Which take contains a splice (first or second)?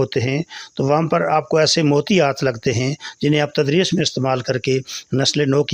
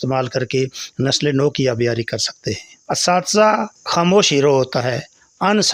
second